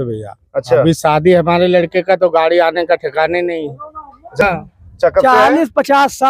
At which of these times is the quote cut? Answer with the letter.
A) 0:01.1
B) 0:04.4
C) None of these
B